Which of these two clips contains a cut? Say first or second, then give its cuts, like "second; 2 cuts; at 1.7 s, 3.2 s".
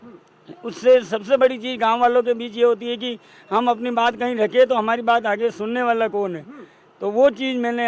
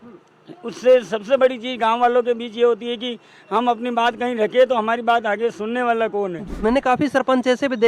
second; 1 cut; at 6.4 s